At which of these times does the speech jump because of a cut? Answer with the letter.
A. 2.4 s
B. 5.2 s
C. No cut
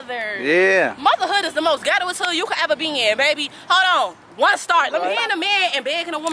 B